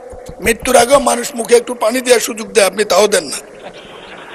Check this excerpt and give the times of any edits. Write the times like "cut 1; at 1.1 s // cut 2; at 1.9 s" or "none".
none